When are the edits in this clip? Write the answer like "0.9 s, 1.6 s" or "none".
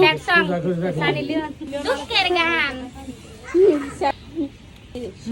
1.6 s, 4.1 s

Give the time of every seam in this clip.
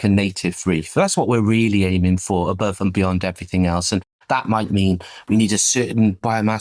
none

